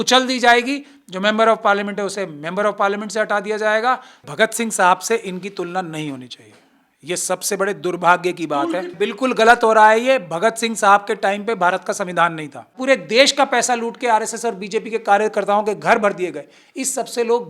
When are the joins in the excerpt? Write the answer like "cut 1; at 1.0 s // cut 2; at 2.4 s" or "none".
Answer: cut 1; at 4.2 s // cut 2; at 8.9 s // cut 3; at 12.8 s